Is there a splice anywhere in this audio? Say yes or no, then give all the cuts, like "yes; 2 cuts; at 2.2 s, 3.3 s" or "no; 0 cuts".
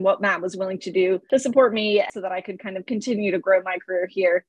yes; 2 cuts; at 1.2 s, 2.1 s